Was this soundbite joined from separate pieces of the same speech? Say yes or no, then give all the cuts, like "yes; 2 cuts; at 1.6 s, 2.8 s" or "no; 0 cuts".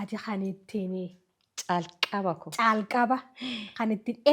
no; 0 cuts